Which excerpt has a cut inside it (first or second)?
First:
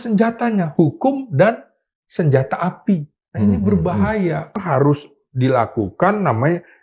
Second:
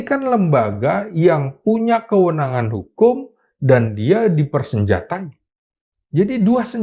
first